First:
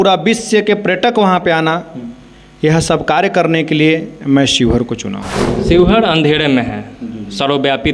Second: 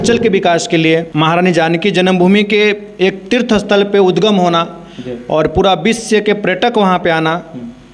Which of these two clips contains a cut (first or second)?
second